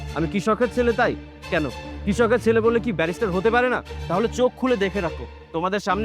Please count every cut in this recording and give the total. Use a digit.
1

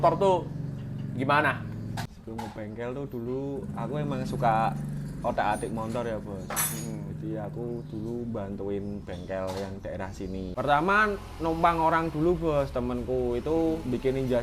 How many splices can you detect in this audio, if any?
2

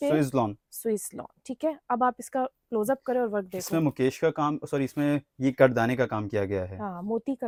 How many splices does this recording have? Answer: 0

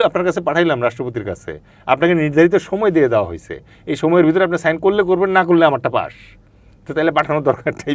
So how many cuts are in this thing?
0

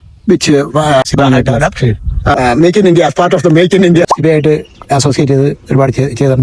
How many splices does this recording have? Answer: 2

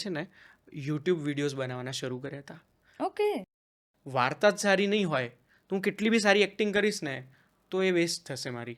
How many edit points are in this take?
1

